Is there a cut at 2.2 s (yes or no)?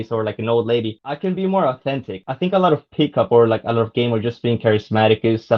yes